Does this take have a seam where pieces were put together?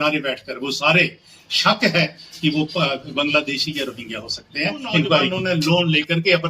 yes; 1 cut; at 5.4 s

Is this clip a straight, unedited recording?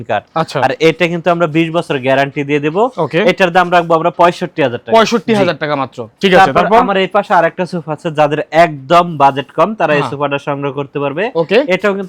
yes; 0 cuts

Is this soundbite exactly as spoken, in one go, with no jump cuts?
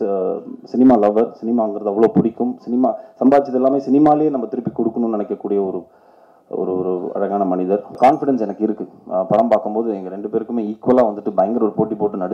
no; 1 cut; at 7.9 s

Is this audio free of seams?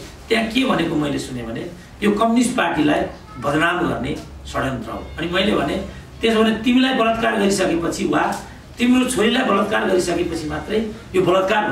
yes; 0 cuts

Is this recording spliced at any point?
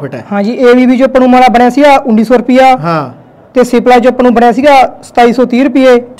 no; 0 cuts

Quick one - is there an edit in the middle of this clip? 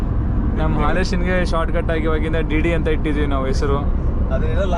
no; 0 cuts

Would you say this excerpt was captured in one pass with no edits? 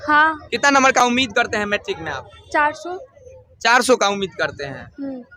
yes; 0 cuts

